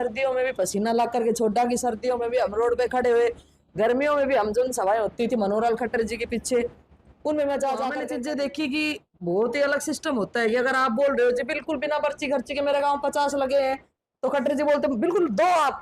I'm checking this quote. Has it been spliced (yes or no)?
yes